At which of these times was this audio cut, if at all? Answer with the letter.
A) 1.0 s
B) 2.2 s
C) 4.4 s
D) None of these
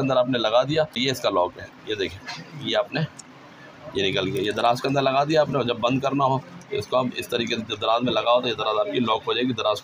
A